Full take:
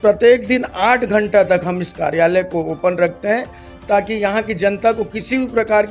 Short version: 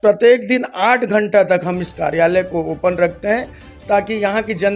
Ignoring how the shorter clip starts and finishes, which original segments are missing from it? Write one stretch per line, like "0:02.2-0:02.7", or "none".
none